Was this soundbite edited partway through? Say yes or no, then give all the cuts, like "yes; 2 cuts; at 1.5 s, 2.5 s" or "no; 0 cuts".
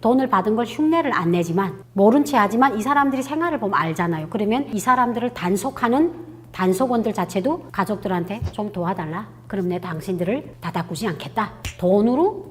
no; 0 cuts